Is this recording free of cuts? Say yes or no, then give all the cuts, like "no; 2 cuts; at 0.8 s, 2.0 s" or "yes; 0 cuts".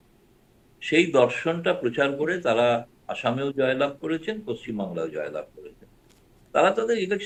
yes; 0 cuts